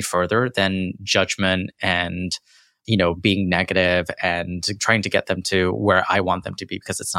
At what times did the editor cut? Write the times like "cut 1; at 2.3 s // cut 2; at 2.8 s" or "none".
none